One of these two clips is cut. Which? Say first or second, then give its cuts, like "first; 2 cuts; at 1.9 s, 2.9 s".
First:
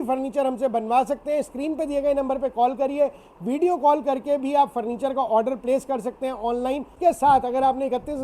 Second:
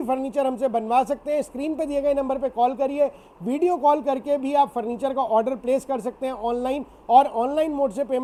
first; 1 cut; at 6.9 s